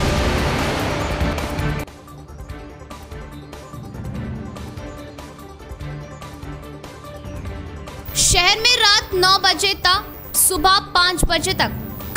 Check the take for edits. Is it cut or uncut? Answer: cut